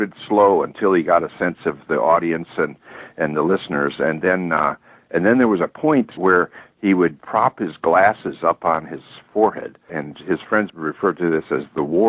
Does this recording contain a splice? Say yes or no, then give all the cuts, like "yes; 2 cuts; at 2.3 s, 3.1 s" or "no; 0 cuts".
yes; 3 cuts; at 6.2 s, 7.2 s, 10.7 s